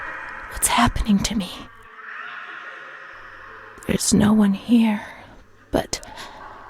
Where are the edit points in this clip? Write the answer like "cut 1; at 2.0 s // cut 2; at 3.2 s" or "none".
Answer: cut 1; at 1.8 s // cut 2; at 3.8 s